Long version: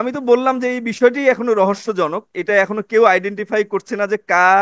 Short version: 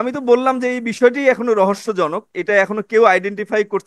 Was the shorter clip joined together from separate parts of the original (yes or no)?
no